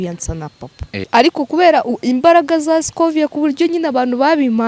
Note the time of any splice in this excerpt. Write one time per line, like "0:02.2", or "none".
0:01.1